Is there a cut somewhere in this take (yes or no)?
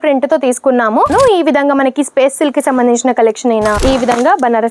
yes